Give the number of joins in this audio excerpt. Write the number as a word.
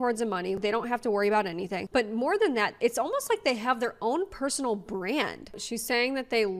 one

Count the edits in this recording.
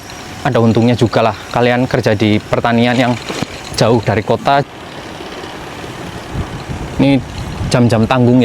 one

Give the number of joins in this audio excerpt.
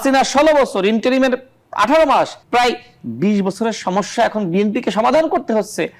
one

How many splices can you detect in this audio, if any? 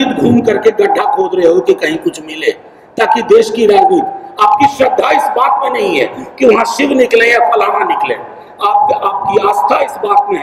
zero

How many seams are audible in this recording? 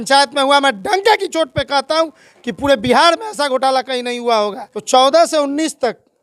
one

